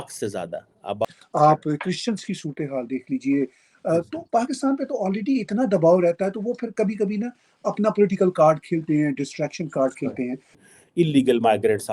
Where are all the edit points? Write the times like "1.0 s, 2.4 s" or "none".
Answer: 1.0 s, 10.6 s